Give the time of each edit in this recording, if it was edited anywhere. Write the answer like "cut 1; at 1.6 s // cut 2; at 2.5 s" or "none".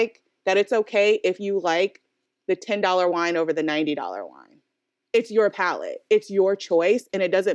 none